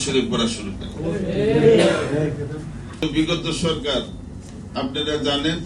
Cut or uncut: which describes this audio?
cut